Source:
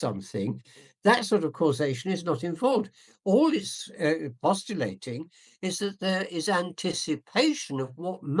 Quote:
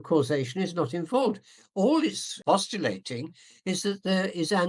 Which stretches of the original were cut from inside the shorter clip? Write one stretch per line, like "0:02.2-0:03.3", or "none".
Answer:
0:03.8-0:04.3